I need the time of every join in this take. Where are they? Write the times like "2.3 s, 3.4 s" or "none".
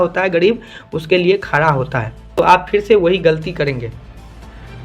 2.3 s